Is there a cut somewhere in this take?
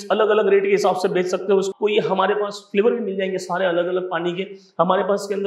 yes; 1 cut; at 1.7 s

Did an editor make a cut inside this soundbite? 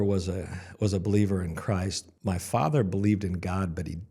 yes; 1 cut; at 2.0 s

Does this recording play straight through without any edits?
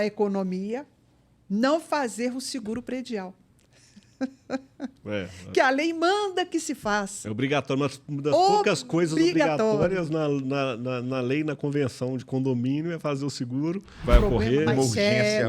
no; 1 cut; at 14.0 s

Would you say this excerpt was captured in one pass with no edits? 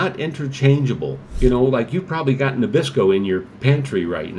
no; 1 cut; at 1.2 s

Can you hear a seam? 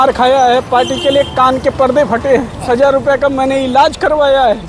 yes; 1 cut; at 2.7 s

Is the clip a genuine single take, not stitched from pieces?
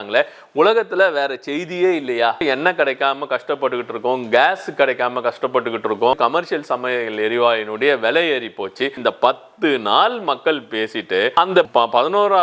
no; 3 cuts; at 2.4 s, 6.2 s, 9.0 s

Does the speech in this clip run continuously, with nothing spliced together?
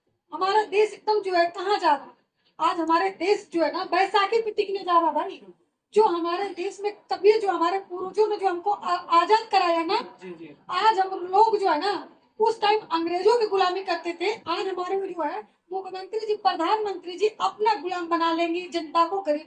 yes; 0 cuts

